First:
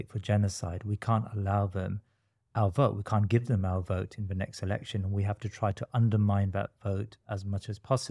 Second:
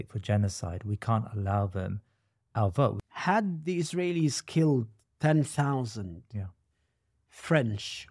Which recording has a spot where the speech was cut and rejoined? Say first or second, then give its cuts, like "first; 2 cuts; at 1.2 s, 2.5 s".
second; 1 cut; at 3.0 s